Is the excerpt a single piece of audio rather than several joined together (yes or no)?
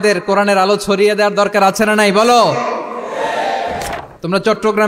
no